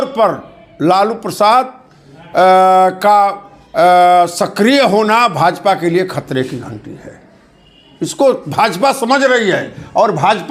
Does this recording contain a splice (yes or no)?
no